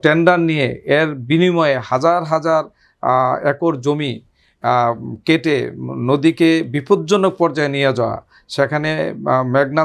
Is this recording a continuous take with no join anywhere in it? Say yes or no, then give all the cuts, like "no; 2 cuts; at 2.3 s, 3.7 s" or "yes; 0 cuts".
yes; 0 cuts